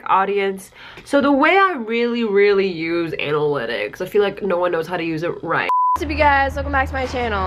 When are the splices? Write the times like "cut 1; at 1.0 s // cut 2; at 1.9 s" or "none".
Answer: cut 1; at 6.0 s